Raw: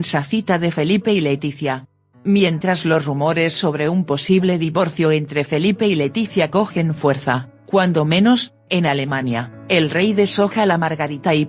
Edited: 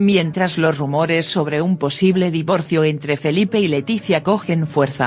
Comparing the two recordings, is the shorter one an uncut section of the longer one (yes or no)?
yes